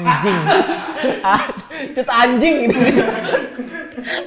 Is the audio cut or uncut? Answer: uncut